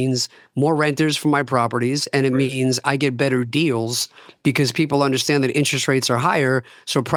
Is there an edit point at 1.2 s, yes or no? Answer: no